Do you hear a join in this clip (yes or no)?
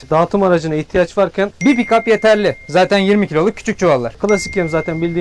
yes